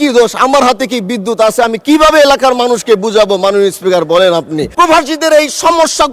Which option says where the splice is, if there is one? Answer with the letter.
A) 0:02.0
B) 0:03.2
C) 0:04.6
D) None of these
C